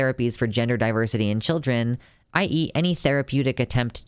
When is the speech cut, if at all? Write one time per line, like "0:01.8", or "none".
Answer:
none